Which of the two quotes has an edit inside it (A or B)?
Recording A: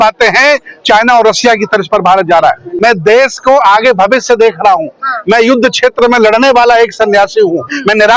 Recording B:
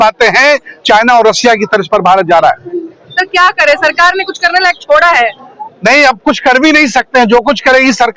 A